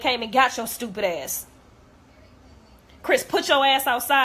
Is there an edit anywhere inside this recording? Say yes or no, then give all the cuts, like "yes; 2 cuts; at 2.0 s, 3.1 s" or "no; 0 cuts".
no; 0 cuts